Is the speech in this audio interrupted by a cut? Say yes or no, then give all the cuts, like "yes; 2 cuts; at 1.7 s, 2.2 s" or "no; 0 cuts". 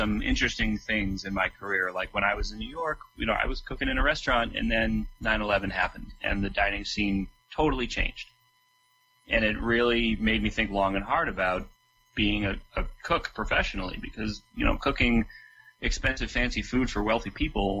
no; 0 cuts